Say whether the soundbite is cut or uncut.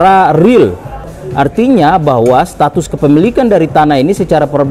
cut